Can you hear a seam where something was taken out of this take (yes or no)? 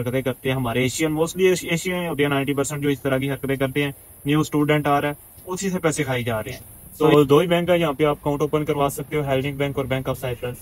yes